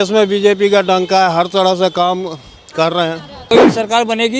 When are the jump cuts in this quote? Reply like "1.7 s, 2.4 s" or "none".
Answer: 3.3 s